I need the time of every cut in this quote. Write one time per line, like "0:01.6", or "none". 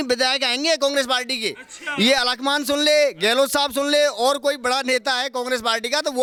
none